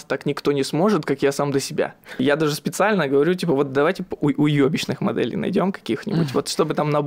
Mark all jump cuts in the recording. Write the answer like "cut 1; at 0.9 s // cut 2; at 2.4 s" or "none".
cut 1; at 2.2 s